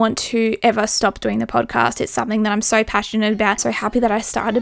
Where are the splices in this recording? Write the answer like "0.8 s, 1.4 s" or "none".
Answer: 3.7 s

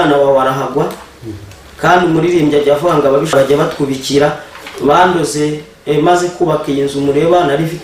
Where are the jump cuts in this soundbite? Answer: 3.3 s

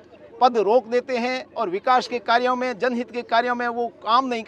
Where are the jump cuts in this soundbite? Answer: none

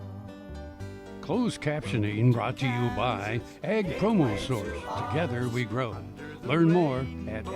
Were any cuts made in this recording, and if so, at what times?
1.3 s

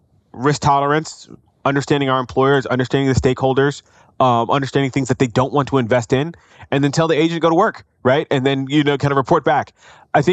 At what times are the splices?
none

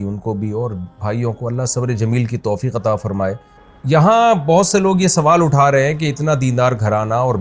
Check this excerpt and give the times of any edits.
4.1 s

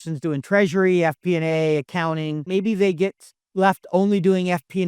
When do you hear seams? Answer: 2.4 s

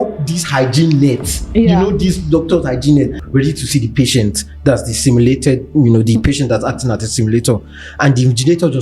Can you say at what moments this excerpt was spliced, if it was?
3.2 s

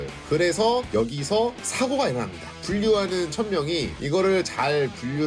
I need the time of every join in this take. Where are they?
none

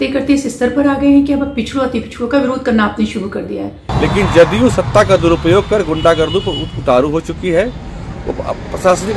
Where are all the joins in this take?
3.8 s

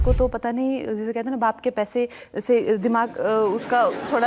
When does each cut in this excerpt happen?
none

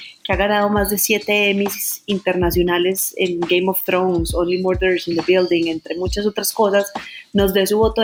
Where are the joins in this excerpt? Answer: none

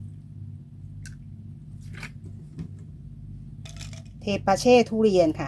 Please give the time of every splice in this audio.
3.7 s

